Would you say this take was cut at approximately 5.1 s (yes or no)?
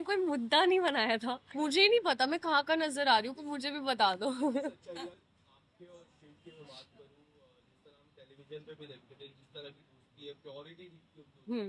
yes